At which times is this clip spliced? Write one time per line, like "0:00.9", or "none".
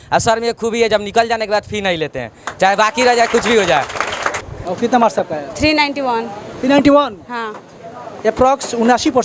none